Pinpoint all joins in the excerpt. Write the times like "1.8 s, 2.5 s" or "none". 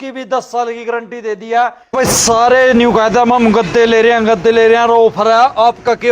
1.9 s